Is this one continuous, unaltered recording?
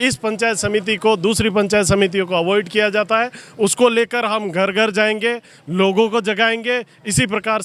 yes; 0 cuts

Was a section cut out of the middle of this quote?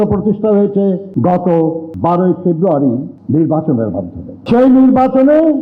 no; 0 cuts

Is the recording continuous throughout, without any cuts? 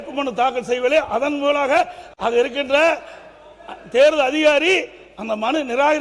yes; 0 cuts

